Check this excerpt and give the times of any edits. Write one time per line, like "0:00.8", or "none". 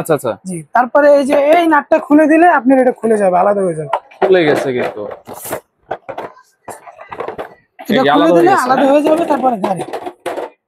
none